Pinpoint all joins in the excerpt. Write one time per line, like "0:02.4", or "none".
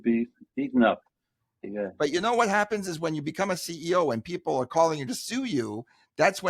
0:01.7